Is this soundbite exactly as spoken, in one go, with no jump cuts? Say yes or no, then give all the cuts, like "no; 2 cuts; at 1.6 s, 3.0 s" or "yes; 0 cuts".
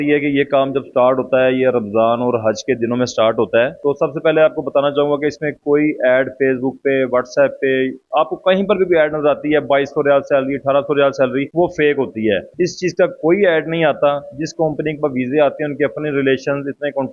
yes; 0 cuts